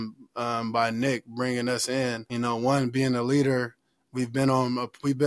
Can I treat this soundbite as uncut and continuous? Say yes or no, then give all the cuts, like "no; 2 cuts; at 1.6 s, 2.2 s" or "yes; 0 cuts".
no; 1 cut; at 2.2 s